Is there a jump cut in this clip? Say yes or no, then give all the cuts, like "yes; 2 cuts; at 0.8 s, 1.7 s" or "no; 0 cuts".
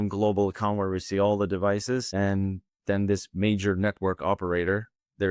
yes; 1 cut; at 2.1 s